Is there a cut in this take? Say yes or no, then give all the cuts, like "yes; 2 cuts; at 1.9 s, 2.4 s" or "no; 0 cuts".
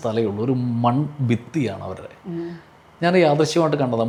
no; 0 cuts